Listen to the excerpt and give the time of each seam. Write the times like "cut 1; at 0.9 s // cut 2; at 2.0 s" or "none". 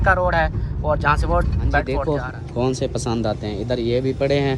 cut 1; at 1.9 s